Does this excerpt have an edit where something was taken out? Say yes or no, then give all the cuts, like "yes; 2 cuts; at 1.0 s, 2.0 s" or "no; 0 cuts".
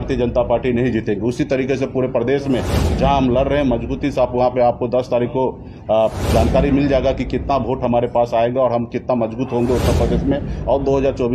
no; 0 cuts